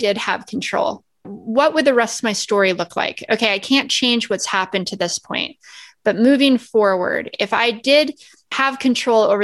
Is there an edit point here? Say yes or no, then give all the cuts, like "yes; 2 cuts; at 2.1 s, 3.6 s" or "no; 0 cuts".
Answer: yes; 2 cuts; at 1.3 s, 8.6 s